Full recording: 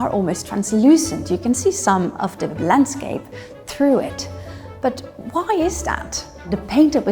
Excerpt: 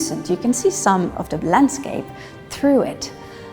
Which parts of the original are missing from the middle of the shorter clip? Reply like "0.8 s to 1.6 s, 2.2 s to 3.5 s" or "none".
2.3 s to 2.4 s